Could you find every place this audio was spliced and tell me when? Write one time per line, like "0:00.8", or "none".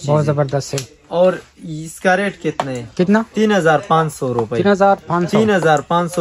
none

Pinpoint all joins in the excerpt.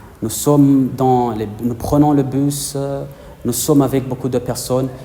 none

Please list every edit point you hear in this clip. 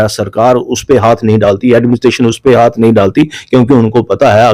none

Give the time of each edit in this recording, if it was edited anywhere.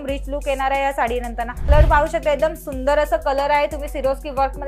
0:01.7

